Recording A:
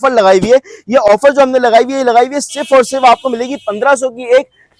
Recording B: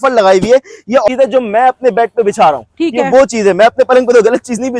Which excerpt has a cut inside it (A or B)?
B